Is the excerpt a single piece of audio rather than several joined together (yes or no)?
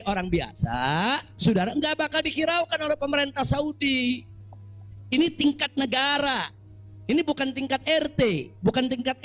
yes